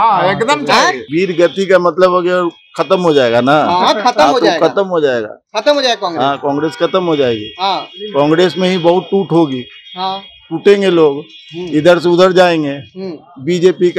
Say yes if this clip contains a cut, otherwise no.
yes